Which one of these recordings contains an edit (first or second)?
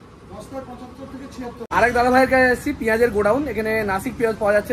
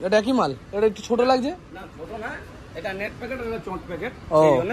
first